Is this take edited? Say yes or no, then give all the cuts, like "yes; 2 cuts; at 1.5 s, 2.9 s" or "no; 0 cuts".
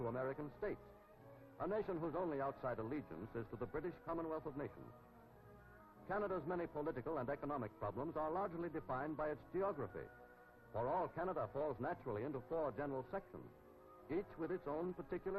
yes; 1 cut; at 12.0 s